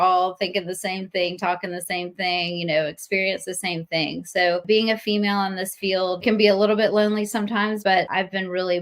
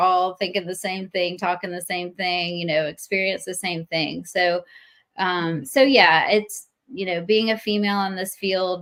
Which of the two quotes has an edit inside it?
first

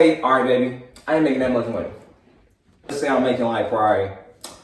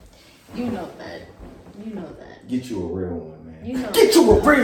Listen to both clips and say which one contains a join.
first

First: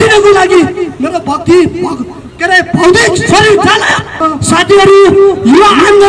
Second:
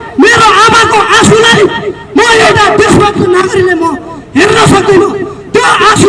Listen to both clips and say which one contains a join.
first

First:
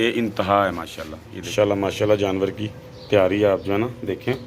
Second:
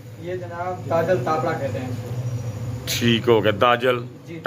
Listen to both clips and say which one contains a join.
first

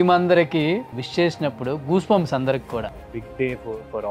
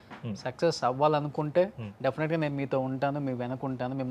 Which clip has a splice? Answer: first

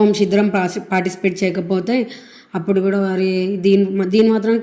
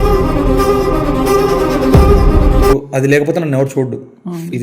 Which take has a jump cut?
second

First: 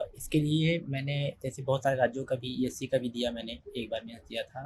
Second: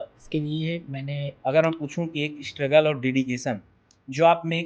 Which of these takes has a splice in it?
second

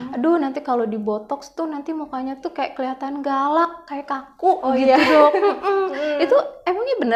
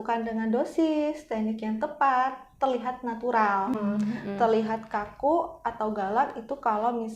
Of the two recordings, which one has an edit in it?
second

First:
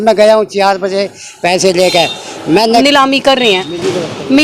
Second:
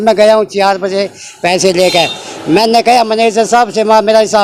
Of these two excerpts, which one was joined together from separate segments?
first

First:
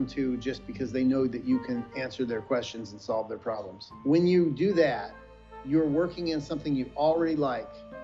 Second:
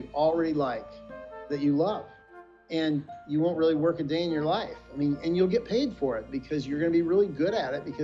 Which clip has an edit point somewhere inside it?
first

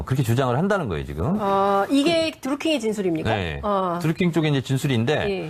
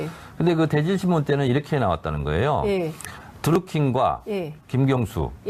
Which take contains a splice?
second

